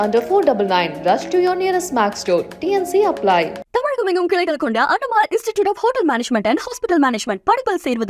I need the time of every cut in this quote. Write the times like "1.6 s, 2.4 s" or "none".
none